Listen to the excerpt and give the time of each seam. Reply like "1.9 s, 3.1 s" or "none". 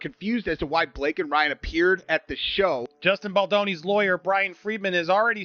2.9 s, 4.0 s